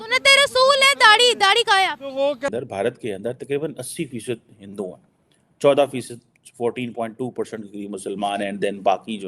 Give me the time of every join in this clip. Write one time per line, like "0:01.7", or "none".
0:02.5